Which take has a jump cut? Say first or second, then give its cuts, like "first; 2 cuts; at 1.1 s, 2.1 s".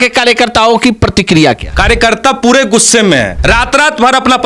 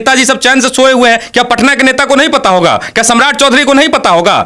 first; 2 cuts; at 1.7 s, 3.3 s